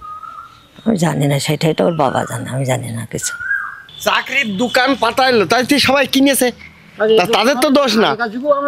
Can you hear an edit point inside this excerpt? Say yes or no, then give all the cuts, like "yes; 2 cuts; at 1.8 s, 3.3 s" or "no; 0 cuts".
yes; 1 cut; at 3.7 s